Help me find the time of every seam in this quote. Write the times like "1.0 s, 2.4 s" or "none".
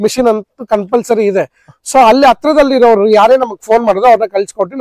none